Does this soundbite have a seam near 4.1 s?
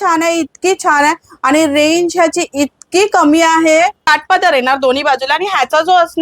yes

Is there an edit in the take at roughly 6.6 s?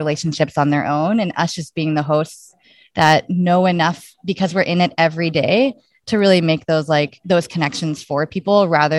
no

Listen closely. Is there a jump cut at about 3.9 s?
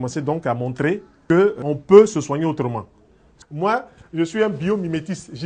no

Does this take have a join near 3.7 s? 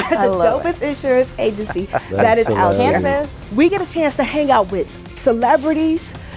yes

